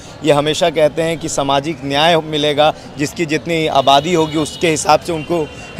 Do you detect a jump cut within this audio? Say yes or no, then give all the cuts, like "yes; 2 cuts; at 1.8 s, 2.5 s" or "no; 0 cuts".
no; 0 cuts